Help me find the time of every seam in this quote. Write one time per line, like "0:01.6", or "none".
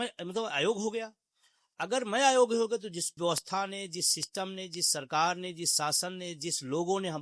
0:03.1